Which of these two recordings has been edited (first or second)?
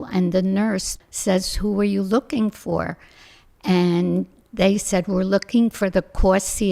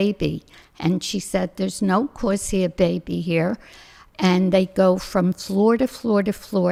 first